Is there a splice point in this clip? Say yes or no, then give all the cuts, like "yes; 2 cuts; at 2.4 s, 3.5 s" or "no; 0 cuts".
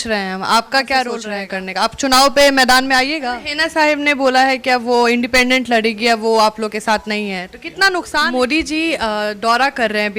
yes; 3 cuts; at 1.2 s, 3.2 s, 8.2 s